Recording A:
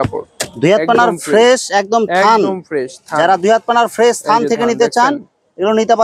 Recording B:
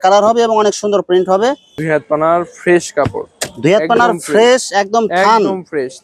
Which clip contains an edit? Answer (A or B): B